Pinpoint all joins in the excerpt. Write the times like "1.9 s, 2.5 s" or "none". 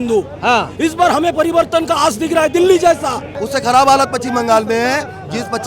3.4 s